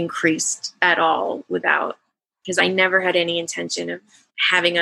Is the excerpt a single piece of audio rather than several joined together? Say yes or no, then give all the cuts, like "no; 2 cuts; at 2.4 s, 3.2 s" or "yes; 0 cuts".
no; 1 cut; at 2.6 s